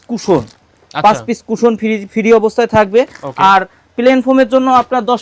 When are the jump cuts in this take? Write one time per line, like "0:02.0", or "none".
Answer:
none